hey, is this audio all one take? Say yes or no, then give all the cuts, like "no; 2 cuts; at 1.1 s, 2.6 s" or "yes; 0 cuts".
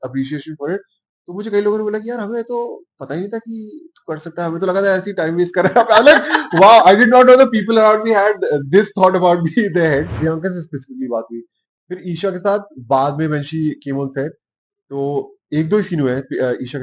no; 1 cut; at 10.1 s